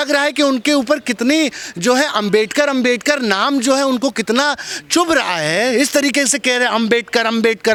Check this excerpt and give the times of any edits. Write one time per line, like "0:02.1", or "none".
none